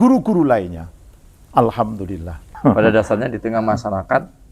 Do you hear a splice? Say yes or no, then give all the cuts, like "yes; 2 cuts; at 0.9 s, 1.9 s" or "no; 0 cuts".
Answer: yes; 1 cut; at 2.4 s